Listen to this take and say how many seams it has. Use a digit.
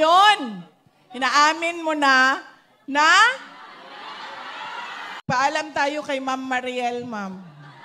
1